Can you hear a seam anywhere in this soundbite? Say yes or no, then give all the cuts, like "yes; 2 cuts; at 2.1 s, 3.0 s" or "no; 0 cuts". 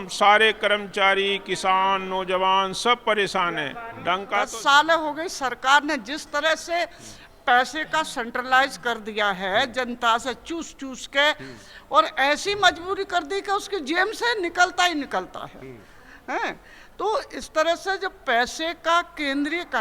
yes; 1 cut; at 4.3 s